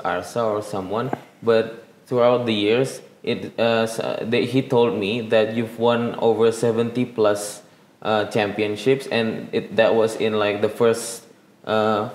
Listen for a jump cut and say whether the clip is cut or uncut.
uncut